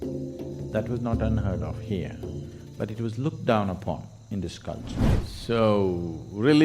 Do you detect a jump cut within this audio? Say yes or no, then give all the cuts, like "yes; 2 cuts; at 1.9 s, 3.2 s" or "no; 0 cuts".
yes; 1 cut; at 5.0 s